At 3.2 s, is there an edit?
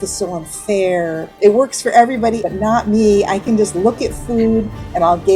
no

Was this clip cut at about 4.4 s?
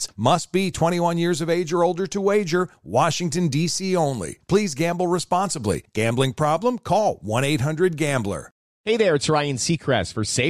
no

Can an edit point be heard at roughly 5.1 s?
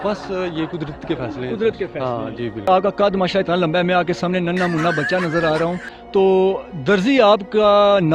no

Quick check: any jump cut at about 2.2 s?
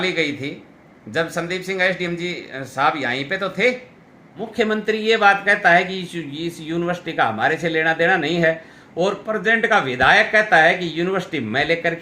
no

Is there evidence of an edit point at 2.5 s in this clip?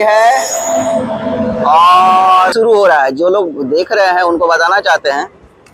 yes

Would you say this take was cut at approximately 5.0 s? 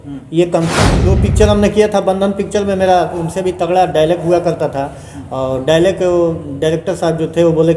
no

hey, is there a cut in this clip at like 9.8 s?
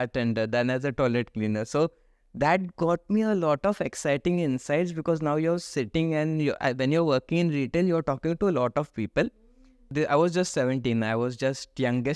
yes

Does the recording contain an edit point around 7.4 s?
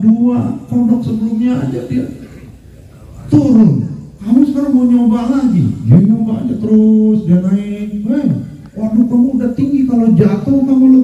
no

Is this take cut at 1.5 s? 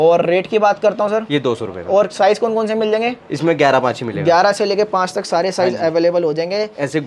no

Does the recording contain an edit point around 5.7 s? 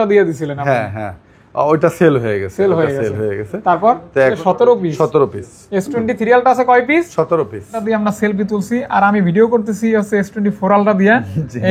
no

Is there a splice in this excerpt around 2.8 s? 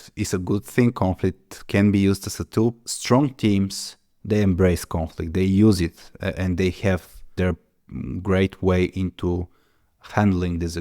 yes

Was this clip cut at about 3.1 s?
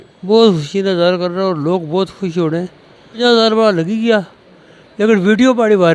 yes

